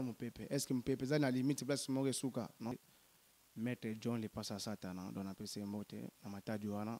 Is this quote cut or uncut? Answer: cut